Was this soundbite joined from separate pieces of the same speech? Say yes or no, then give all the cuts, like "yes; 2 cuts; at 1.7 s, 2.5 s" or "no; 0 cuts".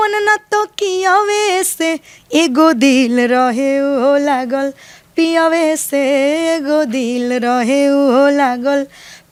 no; 0 cuts